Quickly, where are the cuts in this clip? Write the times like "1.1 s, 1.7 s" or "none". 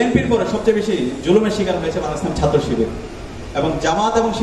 none